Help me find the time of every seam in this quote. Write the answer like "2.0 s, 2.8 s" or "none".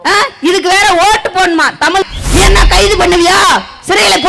2.0 s